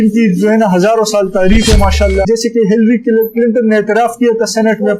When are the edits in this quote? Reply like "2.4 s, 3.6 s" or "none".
2.3 s